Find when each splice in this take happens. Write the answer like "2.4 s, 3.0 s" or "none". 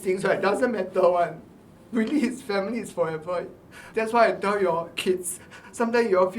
none

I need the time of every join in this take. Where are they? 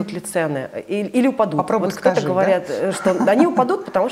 none

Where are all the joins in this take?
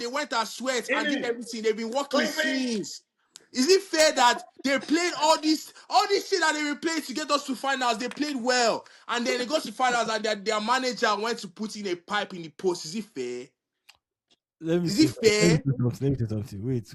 none

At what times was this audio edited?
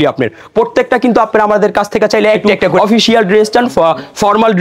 2.6 s

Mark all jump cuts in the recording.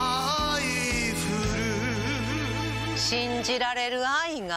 3.0 s

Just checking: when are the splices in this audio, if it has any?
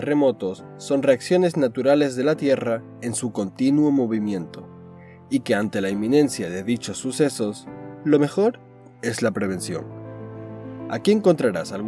none

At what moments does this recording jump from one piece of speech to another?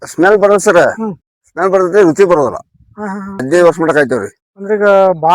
3.4 s

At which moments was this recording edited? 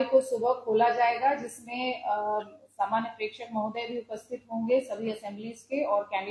none

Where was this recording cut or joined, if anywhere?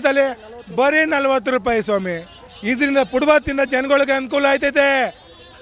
2.5 s

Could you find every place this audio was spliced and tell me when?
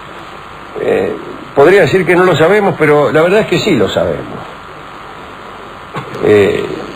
4.3 s

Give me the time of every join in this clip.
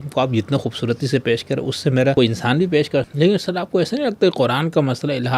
2.1 s, 3.1 s

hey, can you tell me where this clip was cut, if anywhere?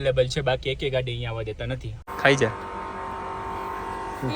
2.0 s

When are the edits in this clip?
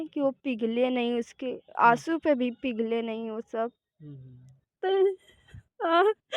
4.7 s

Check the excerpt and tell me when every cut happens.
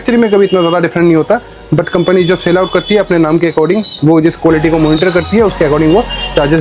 none

